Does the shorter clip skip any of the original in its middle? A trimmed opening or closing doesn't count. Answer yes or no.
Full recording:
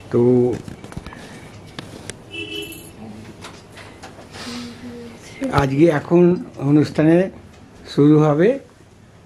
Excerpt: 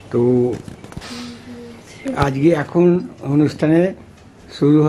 yes